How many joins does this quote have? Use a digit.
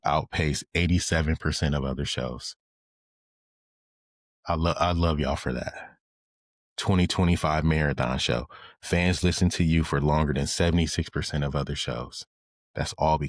0